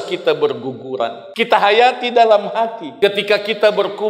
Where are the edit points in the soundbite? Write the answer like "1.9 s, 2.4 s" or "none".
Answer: 1.2 s, 2.8 s

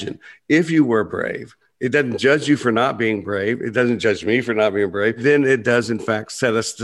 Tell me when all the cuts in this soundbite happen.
5.2 s

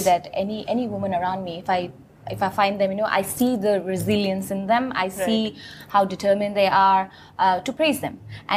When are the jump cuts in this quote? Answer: none

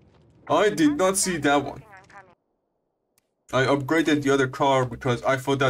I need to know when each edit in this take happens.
2.4 s

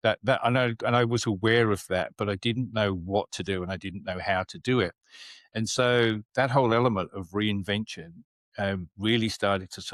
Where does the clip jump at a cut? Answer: none

